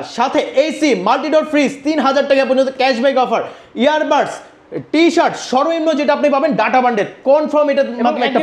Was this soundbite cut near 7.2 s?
no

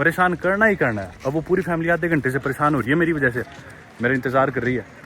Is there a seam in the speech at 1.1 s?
no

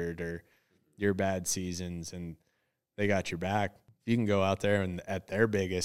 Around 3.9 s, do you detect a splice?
yes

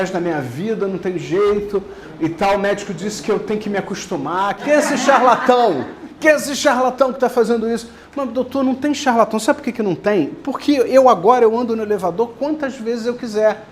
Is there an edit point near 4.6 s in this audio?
yes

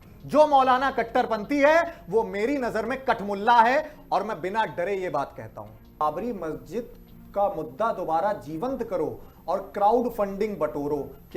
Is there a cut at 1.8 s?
no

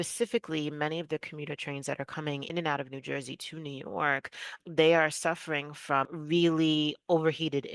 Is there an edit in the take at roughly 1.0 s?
no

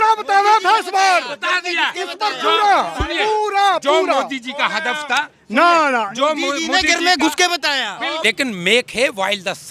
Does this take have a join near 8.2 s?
yes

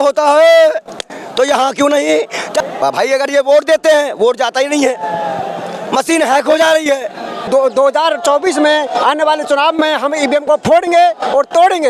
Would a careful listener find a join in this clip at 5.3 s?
no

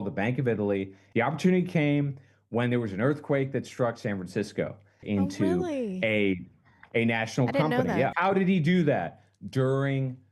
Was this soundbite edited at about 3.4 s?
no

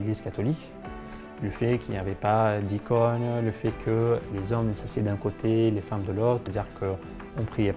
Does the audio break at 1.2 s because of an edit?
yes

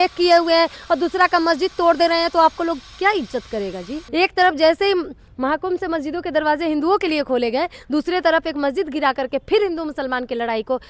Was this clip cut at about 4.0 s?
yes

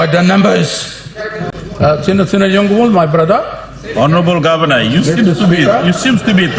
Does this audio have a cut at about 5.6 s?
no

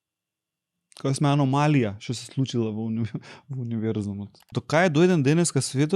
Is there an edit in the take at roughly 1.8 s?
no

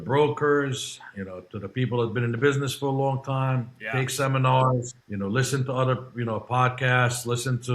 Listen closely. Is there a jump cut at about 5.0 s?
yes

